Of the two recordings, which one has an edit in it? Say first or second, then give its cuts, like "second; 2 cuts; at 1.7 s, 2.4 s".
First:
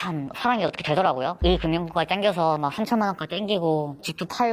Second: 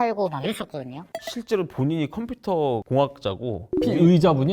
second; 1 cut; at 1.1 s